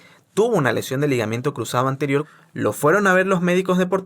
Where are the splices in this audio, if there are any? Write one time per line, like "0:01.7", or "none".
0:02.4